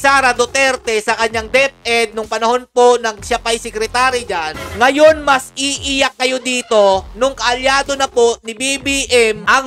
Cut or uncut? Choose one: cut